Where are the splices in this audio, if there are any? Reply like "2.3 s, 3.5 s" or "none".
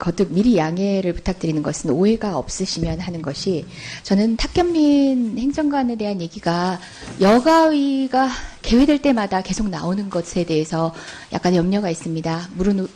5.3 s